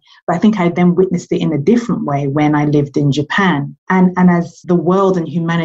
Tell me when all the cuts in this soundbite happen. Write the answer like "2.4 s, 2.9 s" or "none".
3.7 s, 4.5 s